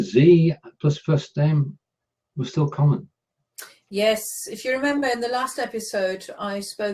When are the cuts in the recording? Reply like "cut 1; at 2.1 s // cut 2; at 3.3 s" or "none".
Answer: cut 1; at 3.1 s